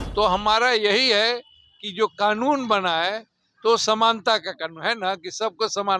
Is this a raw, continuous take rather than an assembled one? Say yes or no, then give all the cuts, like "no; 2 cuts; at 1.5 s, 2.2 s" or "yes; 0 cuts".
yes; 0 cuts